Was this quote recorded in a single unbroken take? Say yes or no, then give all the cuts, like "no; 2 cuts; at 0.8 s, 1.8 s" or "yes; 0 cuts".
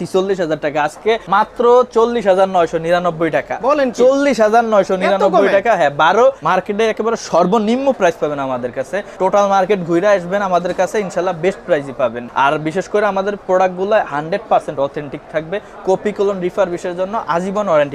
no; 4 cuts; at 1.2 s, 6.4 s, 9.0 s, 12.2 s